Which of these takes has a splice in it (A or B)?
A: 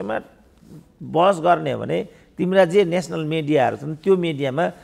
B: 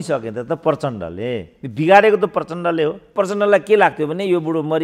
B